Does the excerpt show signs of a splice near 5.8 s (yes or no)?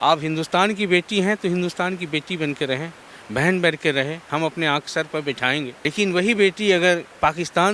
yes